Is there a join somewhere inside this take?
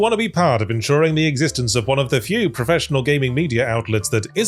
no; 0 cuts

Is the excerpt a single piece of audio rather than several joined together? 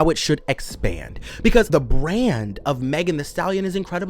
no; 1 cut; at 1.7 s

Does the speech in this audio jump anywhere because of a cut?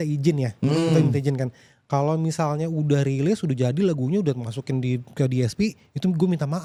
no; 0 cuts

